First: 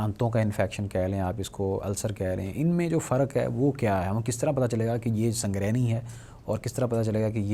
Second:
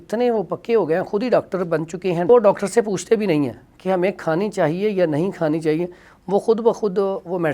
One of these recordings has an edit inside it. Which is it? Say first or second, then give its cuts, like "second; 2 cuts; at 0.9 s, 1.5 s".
second; 1 cut; at 2.3 s